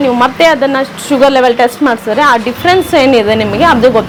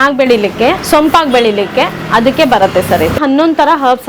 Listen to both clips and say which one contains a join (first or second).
second